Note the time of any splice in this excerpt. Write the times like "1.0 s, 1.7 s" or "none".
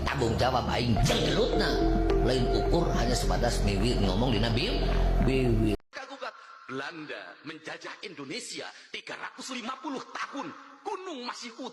5.8 s